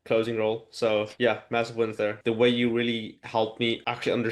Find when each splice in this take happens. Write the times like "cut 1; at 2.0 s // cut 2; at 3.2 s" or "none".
cut 1; at 1.1 s // cut 2; at 2.1 s